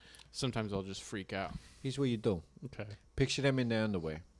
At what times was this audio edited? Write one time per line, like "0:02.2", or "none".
0:01.6